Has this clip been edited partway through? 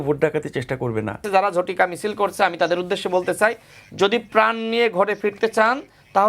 yes; 1 cut; at 1.2 s

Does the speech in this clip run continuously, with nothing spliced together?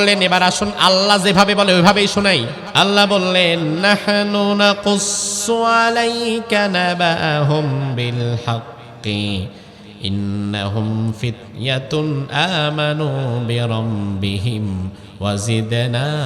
no; 1 cut; at 2.6 s

